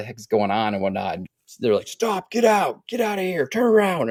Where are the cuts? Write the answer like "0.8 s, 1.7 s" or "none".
none